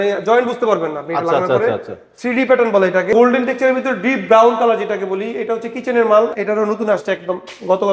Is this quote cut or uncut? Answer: cut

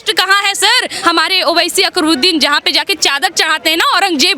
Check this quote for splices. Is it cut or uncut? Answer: cut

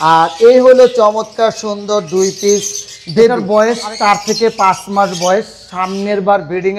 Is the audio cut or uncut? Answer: cut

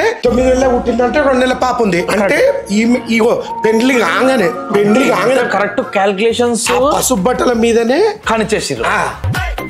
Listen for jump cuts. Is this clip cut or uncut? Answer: uncut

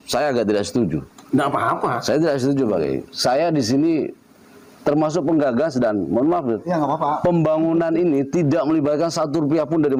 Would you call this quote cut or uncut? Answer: uncut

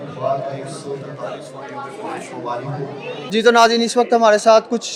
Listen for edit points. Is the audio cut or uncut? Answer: uncut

